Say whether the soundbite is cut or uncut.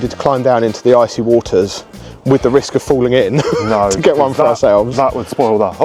uncut